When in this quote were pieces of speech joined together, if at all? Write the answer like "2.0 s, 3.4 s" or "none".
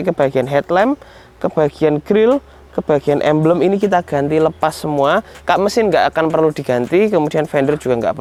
none